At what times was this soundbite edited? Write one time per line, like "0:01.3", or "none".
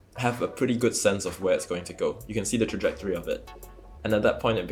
none

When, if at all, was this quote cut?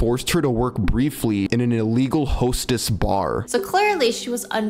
0:01.5
0:03.4

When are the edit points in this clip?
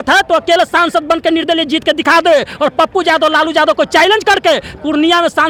none

